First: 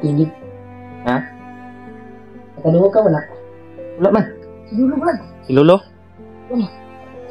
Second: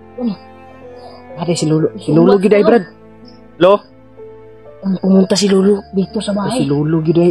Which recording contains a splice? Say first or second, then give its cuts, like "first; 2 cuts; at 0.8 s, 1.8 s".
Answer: first; 1 cut; at 4.5 s